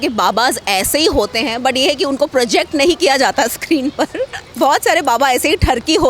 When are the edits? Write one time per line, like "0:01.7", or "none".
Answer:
0:04.4